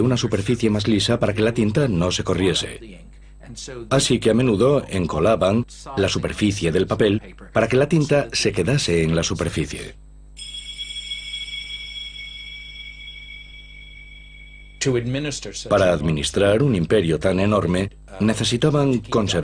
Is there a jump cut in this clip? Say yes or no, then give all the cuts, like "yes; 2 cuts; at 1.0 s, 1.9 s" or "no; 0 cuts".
no; 0 cuts